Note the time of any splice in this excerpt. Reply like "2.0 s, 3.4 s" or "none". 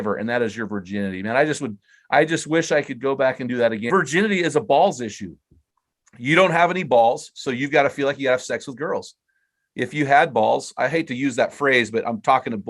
3.8 s